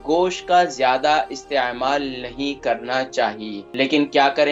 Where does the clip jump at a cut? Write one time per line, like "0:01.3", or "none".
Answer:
0:03.5